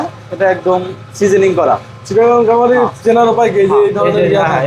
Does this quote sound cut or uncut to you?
uncut